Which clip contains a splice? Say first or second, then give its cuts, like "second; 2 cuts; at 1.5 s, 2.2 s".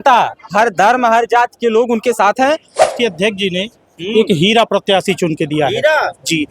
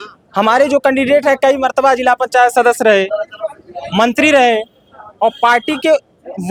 first; 1 cut; at 2.9 s